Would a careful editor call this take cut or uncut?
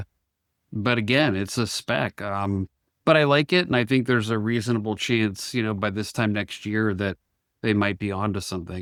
uncut